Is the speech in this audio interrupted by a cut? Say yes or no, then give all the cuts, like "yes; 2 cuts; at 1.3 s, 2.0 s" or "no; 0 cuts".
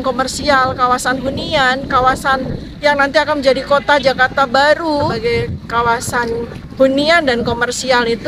yes; 1 cut; at 5.1 s